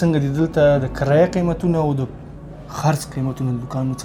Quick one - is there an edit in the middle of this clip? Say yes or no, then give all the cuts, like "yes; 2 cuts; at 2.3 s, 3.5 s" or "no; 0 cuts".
no; 0 cuts